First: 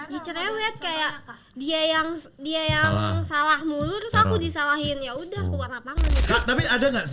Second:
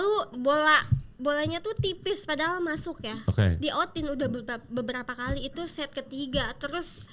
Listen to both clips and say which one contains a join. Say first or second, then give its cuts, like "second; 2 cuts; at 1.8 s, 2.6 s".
first; 1 cut; at 6.2 s